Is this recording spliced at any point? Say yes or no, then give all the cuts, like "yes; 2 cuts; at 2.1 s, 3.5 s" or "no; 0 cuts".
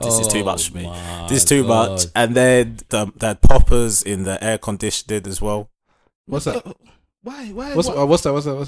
yes; 1 cut; at 2.9 s